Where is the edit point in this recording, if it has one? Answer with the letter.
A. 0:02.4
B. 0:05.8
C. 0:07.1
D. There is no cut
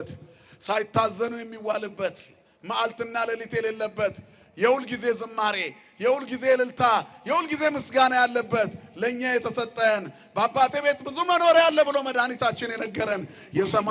D